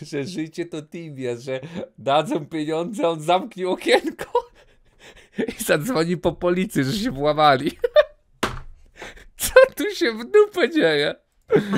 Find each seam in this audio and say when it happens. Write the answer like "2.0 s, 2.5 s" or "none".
none